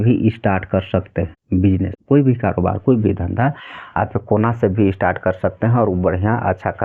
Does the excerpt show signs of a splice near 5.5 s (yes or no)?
no